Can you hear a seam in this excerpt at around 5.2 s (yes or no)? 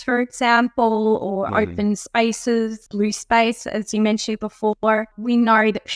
yes